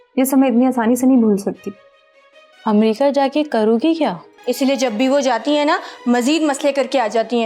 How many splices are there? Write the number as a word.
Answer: one